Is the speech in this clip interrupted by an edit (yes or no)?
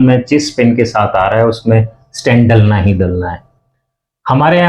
no